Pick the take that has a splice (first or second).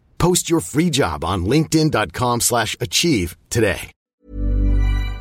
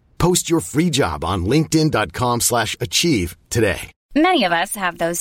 first